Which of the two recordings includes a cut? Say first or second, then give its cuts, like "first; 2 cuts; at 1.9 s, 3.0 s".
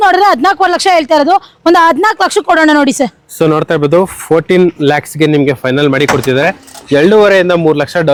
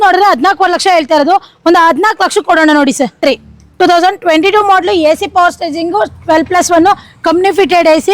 second; 1 cut; at 3.2 s